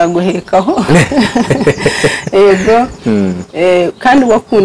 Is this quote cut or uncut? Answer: uncut